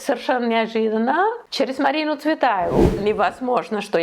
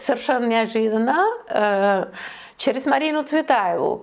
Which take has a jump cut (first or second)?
first